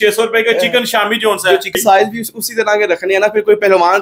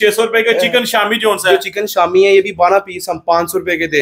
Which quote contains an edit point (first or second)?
first